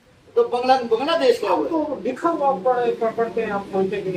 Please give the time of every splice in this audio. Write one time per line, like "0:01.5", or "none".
none